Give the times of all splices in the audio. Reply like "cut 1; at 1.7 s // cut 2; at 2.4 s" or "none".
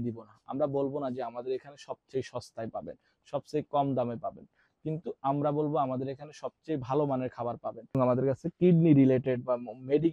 cut 1; at 8.0 s